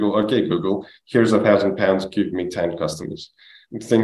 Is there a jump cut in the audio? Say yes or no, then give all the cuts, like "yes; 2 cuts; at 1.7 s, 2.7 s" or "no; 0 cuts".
no; 0 cuts